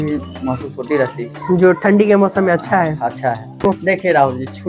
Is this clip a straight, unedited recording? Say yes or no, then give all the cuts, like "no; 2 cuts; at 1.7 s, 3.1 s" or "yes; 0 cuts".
no; 1 cut; at 3.7 s